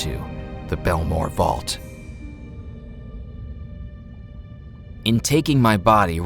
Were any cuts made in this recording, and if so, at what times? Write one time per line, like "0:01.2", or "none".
0:01.6
0:05.0